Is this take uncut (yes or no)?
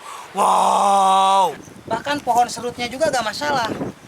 no